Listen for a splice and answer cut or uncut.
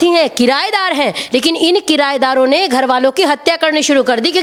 uncut